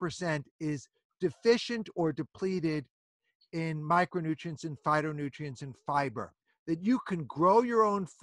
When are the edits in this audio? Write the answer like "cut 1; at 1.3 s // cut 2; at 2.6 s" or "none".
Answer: cut 1; at 6.5 s